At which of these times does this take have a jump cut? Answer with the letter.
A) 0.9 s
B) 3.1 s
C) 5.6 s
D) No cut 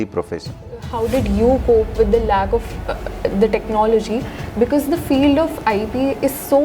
A